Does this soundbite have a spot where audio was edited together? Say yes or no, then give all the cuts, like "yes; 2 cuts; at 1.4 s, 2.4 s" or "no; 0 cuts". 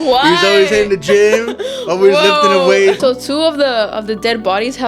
yes; 1 cut; at 3.0 s